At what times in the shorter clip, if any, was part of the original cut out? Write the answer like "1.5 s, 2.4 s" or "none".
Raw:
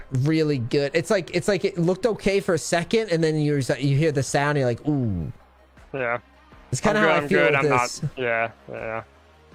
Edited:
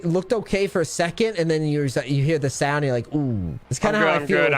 3.6 s